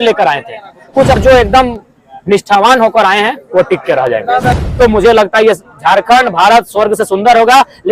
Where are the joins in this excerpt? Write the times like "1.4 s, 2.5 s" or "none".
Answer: 1.2 s, 4.5 s